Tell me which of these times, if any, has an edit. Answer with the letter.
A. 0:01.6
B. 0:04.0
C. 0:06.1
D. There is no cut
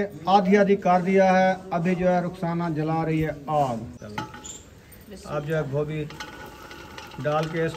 B